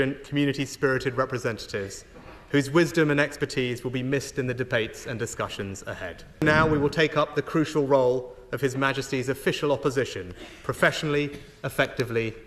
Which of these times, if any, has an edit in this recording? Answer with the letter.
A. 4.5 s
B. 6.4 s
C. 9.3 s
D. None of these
B